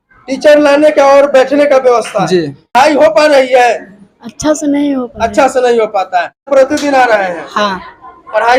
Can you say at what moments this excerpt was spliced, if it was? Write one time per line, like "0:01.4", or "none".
0:02.7
0:06.5

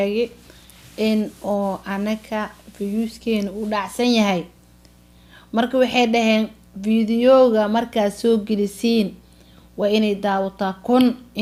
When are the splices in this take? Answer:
none

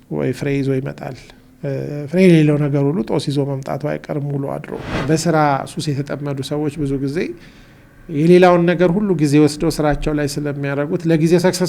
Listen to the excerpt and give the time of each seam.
0:04.8

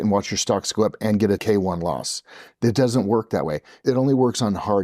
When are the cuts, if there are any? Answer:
0:01.4
0:03.8

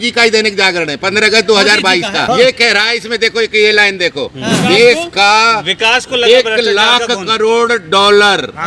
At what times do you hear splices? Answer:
0:02.2

